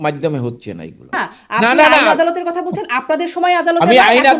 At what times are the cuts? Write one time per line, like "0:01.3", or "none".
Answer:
0:01.2